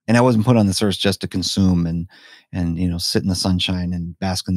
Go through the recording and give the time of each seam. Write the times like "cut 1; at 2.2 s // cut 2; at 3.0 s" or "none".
none